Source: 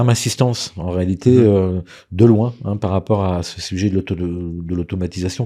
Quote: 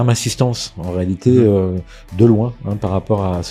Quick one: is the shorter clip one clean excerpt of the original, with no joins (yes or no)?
yes